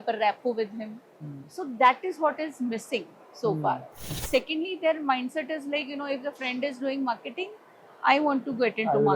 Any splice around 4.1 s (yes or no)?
yes